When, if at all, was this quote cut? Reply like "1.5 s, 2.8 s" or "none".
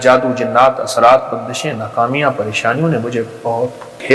none